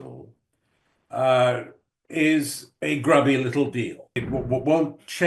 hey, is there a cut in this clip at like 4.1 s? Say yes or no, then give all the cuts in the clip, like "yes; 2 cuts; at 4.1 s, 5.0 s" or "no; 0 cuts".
yes; 1 cut; at 4.1 s